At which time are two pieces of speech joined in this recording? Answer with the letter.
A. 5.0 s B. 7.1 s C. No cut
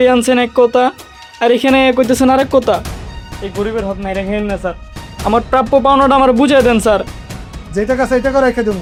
C